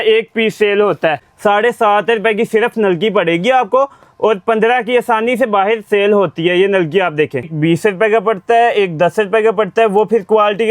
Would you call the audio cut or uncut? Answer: cut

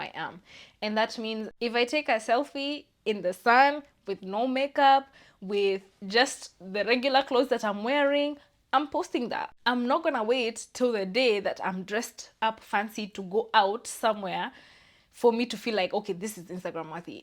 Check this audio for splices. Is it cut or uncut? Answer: cut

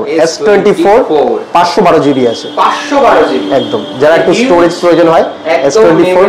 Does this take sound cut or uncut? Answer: uncut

